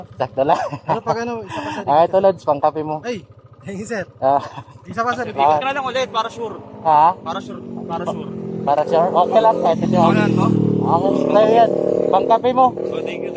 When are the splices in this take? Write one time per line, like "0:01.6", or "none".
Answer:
0:05.3